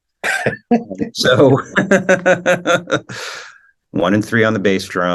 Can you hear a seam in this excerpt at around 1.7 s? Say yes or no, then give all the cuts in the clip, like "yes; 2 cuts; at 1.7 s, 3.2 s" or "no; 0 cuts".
no; 1 cut; at 3.6 s